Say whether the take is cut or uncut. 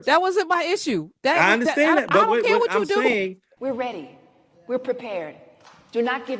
cut